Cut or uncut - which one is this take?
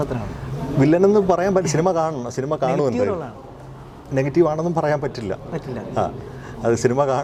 uncut